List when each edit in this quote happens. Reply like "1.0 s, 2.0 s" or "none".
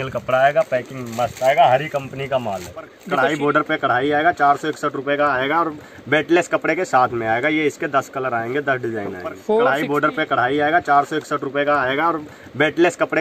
3.0 s, 9.7 s

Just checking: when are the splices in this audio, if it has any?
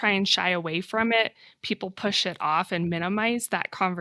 none

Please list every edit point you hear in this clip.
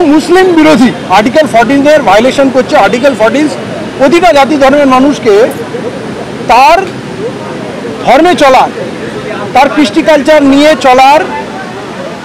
none

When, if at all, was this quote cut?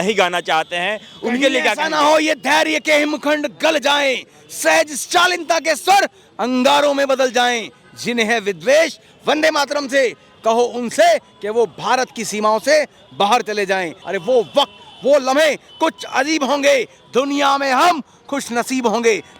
14.0 s

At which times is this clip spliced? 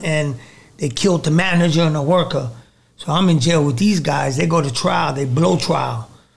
none

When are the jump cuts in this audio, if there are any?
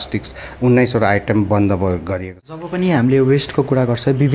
2.7 s

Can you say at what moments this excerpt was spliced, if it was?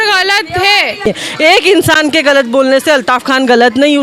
1.1 s

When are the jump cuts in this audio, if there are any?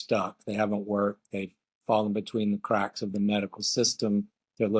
none

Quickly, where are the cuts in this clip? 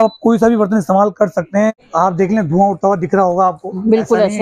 1.7 s

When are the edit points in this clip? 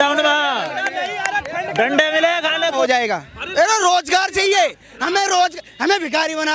2.8 s

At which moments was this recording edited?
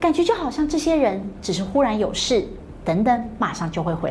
none

